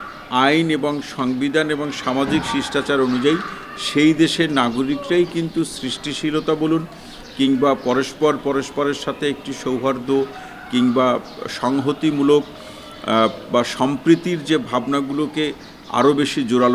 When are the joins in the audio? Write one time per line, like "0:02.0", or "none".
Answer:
none